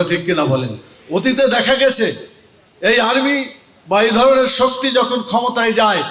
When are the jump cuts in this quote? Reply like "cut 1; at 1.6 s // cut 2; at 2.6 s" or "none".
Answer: none